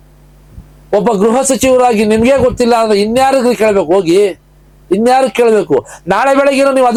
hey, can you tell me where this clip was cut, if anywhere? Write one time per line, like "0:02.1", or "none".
none